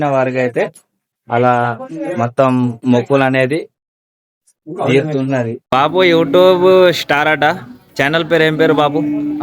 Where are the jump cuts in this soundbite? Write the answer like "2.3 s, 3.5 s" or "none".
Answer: 5.6 s